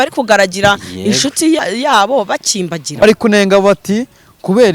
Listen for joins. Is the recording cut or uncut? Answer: cut